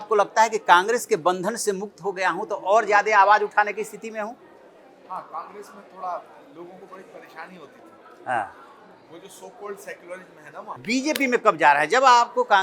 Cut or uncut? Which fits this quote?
cut